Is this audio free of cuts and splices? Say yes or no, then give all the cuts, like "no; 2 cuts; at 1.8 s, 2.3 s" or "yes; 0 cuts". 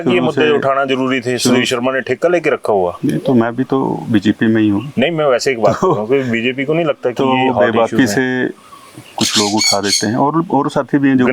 yes; 0 cuts